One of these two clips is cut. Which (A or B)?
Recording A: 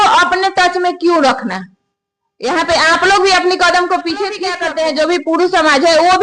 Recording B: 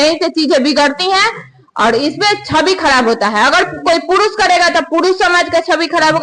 A